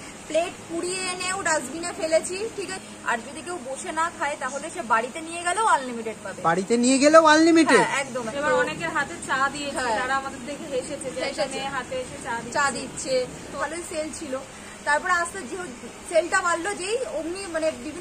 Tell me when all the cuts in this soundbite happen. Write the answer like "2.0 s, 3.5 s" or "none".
2.8 s, 8.2 s, 13.6 s